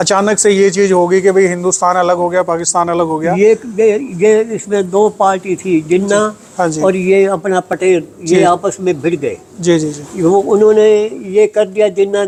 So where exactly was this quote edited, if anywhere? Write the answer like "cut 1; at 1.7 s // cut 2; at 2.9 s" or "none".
none